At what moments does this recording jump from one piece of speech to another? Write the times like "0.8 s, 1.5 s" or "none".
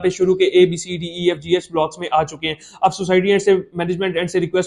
none